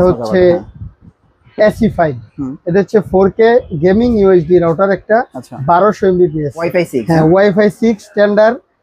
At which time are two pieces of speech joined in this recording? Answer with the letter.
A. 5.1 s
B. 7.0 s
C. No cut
B